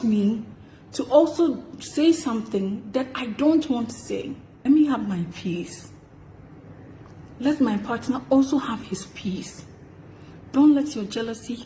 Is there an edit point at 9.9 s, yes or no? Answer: no